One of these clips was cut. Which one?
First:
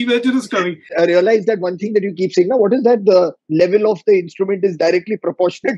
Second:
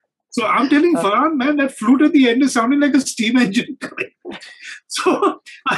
first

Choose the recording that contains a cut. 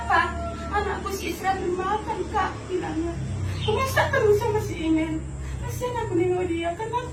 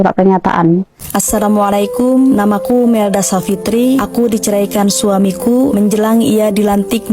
second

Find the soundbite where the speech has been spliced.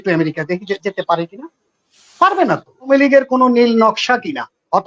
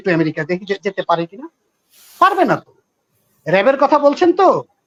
first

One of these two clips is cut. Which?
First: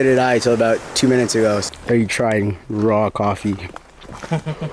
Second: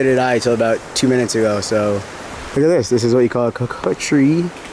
first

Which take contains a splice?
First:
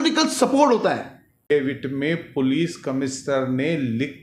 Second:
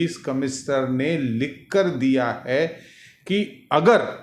first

